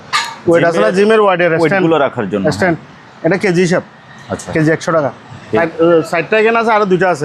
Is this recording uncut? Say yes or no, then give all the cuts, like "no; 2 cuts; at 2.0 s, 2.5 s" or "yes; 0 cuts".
no; 1 cut; at 5.6 s